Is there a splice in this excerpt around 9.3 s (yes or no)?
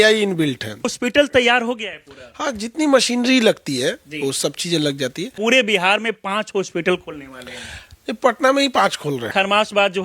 yes